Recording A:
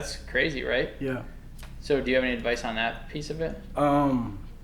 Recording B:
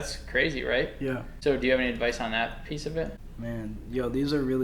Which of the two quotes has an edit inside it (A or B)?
B